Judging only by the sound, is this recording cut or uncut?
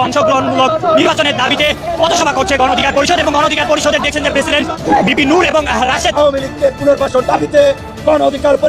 uncut